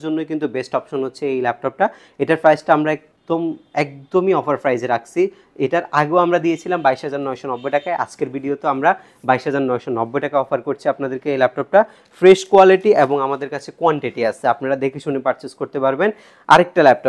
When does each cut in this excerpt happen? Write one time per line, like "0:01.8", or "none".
none